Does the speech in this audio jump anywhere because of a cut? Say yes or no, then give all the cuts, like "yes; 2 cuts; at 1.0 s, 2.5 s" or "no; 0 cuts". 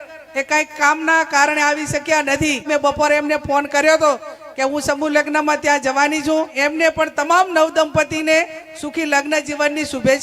yes; 2 cuts; at 2.7 s, 6.5 s